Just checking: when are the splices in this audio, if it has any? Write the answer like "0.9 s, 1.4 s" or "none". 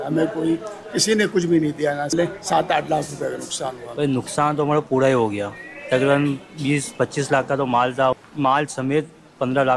2.1 s, 3.8 s, 8.2 s